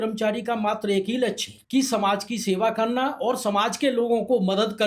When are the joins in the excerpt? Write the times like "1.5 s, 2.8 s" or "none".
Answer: 1.5 s